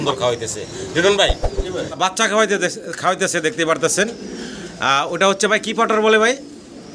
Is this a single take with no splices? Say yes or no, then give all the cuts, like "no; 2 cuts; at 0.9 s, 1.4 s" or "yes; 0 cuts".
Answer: no; 1 cut; at 1.9 s